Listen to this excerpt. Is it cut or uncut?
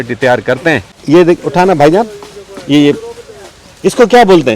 cut